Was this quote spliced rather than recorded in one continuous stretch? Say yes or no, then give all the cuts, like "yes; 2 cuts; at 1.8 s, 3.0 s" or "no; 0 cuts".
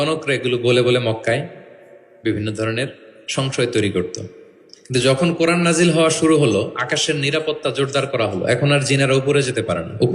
no; 0 cuts